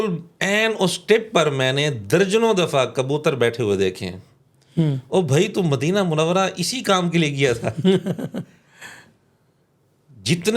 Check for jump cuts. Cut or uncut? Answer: uncut